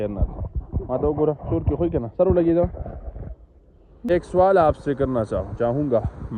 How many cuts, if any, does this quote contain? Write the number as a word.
one